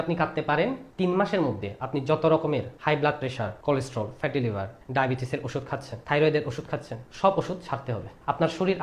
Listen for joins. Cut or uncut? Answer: uncut